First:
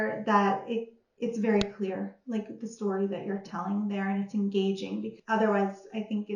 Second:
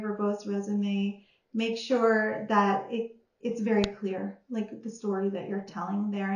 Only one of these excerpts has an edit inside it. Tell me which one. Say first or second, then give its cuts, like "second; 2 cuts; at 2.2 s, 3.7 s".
first; 1 cut; at 5.1 s